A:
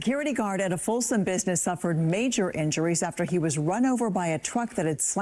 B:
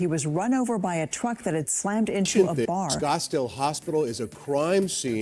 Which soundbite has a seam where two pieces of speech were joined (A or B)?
B